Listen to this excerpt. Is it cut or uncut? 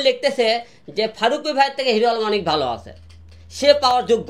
uncut